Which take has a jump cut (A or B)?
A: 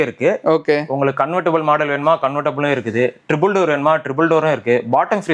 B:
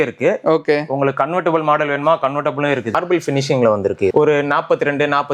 B